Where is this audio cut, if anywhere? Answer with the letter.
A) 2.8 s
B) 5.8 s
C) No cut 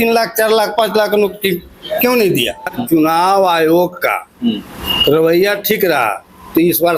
A